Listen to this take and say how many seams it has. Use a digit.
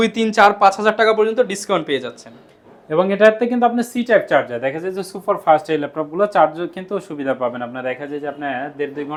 0